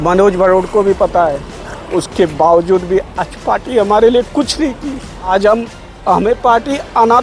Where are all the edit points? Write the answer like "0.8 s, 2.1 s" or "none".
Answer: 5.3 s